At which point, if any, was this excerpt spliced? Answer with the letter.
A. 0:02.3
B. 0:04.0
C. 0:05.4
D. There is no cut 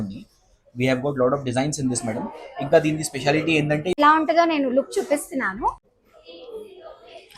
B